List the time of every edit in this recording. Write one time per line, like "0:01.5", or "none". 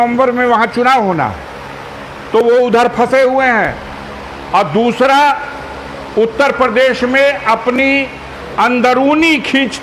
none